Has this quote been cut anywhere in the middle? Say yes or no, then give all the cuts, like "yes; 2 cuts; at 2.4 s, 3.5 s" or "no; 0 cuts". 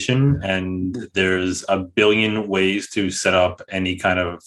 no; 0 cuts